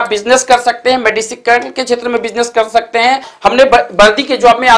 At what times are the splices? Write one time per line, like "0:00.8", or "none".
0:03.3